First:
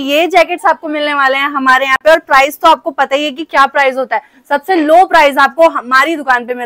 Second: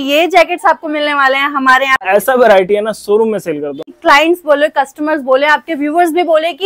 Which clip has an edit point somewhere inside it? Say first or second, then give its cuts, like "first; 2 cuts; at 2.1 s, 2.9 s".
second; 2 cuts; at 2.0 s, 3.9 s